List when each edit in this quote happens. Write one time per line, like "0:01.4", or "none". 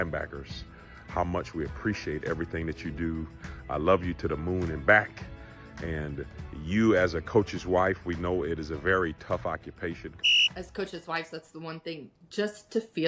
0:10.3